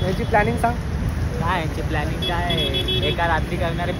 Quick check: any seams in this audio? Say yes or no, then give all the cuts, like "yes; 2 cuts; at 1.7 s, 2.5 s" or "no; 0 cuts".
no; 0 cuts